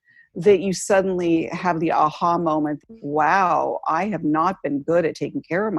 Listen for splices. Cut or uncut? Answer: cut